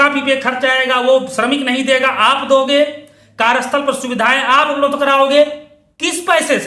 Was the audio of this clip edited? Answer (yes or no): no